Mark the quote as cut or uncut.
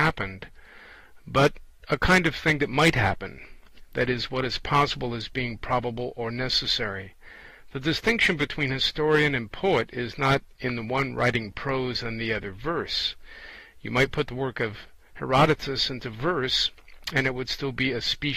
uncut